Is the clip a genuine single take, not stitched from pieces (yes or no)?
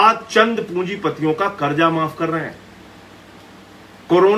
yes